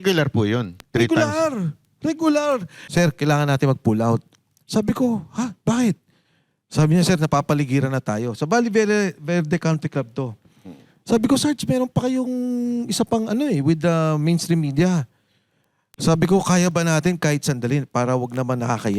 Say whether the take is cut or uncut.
cut